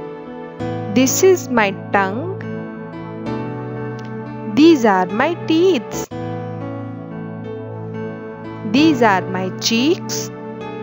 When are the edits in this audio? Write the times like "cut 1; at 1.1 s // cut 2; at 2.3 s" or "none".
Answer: cut 1; at 0.9 s // cut 2; at 2.3 s // cut 3; at 4.5 s // cut 4; at 6.0 s // cut 5; at 8.4 s // cut 6; at 10.0 s